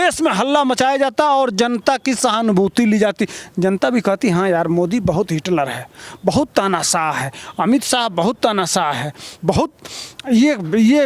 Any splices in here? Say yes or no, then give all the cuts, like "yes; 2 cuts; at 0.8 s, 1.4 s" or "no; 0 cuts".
no; 0 cuts